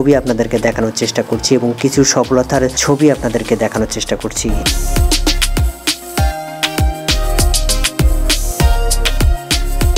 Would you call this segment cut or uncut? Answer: uncut